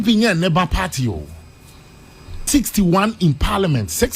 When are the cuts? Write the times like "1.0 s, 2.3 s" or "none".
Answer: 2.5 s